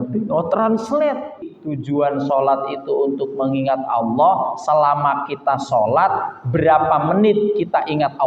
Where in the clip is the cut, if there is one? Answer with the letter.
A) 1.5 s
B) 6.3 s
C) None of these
A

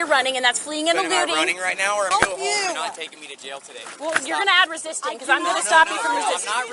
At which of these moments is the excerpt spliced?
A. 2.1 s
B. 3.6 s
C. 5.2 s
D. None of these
A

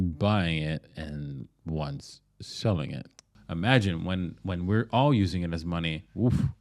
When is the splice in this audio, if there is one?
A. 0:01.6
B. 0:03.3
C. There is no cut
B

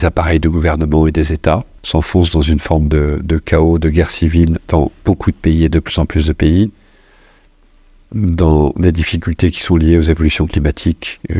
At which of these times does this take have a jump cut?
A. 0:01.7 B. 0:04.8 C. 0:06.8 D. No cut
A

